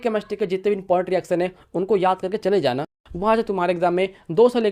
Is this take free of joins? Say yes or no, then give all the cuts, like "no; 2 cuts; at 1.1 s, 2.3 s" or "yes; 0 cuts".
no; 1 cut; at 2.9 s